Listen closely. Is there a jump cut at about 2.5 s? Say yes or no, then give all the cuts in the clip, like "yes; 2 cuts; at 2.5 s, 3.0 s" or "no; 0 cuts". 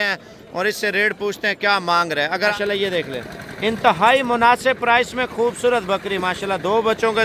yes; 1 cut; at 2.5 s